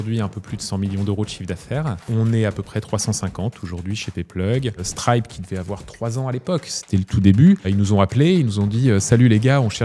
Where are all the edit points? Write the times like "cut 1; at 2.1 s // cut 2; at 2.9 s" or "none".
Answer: cut 1; at 2.1 s // cut 2; at 4.9 s // cut 3; at 7.7 s

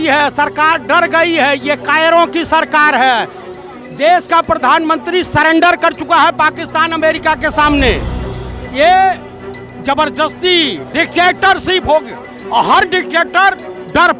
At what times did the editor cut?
none

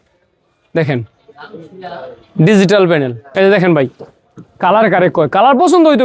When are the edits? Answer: cut 1; at 3.2 s

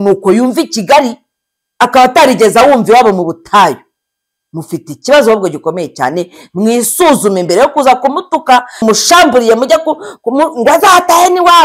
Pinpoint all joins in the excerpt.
cut 1; at 8.8 s

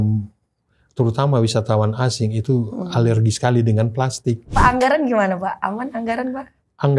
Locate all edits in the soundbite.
cut 1; at 4.4 s

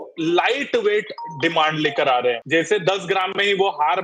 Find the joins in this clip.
cut 1; at 2.4 s

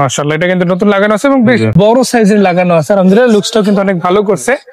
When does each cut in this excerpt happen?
cut 1; at 1.8 s

